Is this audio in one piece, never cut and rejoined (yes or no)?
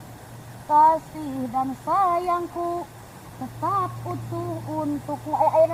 yes